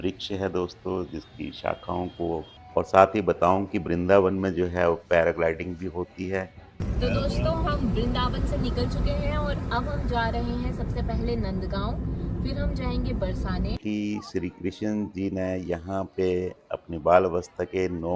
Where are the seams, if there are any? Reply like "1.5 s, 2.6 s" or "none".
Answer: 2.6 s, 6.8 s, 13.8 s